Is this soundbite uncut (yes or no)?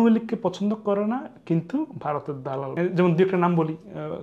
no